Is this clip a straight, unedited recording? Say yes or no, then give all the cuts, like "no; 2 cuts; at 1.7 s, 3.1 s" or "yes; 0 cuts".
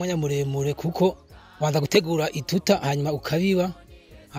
yes; 0 cuts